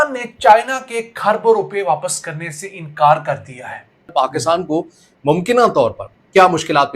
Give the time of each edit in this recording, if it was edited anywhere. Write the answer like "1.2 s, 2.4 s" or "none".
4.4 s